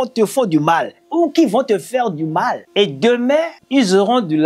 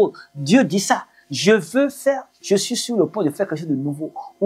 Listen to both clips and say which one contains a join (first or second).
first